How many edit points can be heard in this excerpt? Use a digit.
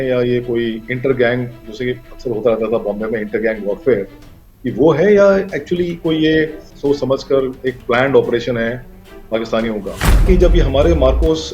2